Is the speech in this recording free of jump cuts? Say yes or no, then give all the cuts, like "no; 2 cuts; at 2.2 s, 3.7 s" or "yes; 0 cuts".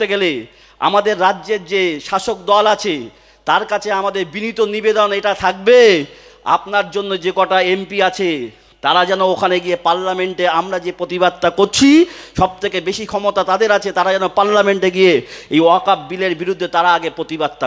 yes; 0 cuts